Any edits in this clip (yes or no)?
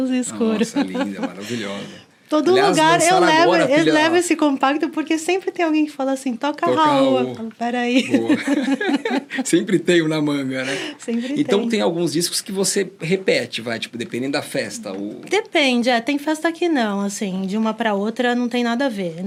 no